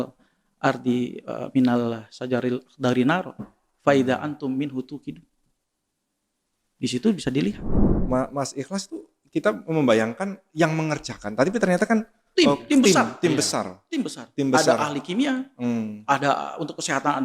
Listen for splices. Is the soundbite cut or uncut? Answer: cut